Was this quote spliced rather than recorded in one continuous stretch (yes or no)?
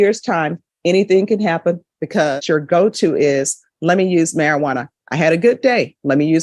yes